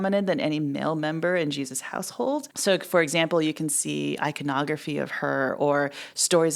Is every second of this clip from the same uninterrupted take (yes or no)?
no